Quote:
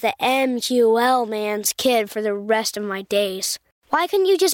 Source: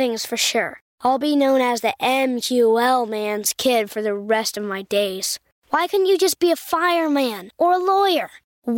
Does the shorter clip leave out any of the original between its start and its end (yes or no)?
no